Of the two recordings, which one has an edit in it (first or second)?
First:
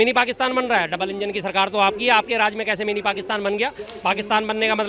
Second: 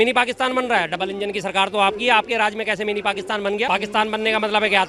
second